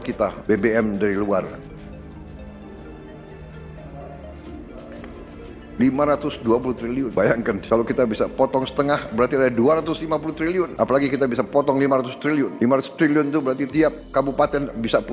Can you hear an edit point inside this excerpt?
no; 0 cuts

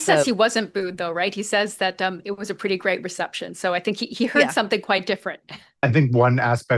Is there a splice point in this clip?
no; 0 cuts

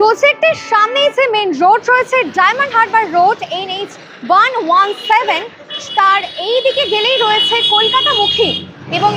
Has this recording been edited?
no; 0 cuts

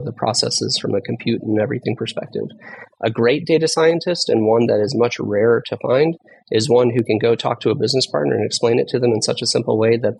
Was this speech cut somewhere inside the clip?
no; 0 cuts

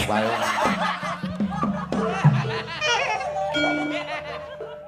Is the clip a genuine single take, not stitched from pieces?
yes; 0 cuts

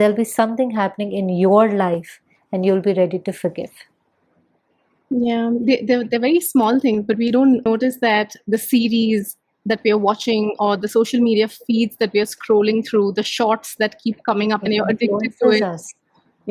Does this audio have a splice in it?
no; 0 cuts

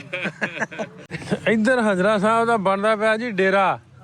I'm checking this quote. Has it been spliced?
yes; 1 cut; at 1.0 s

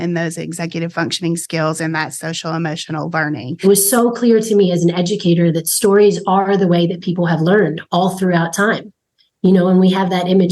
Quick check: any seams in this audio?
yes; 1 cut; at 3.5 s

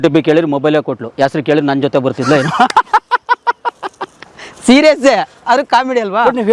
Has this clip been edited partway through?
no; 0 cuts

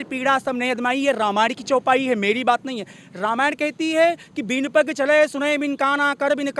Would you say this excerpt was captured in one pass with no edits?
yes; 0 cuts

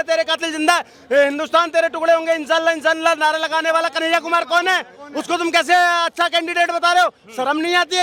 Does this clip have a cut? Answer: no; 0 cuts

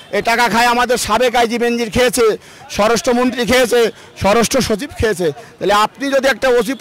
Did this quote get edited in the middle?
no; 0 cuts

